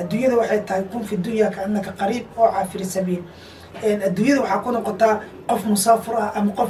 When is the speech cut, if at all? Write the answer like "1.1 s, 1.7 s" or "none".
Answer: none